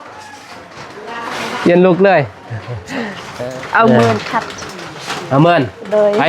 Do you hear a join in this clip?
yes; 1 cut; at 3.2 s

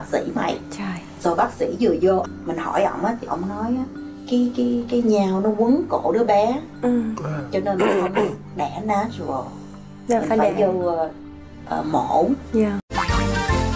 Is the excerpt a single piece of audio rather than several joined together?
no; 1 cut; at 12.9 s

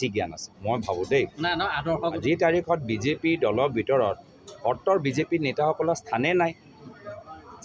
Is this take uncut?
no; 1 cut; at 2.2 s

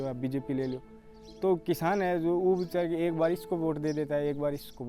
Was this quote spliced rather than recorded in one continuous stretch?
no; 0 cuts

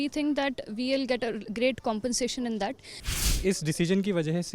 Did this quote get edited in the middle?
yes; 1 cut; at 3.2 s

